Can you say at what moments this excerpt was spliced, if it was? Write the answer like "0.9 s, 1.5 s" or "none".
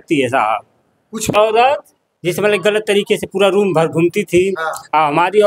1.3 s